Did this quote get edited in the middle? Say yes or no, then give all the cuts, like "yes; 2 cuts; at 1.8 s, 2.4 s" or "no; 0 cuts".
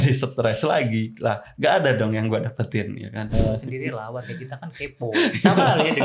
yes; 1 cut; at 3.3 s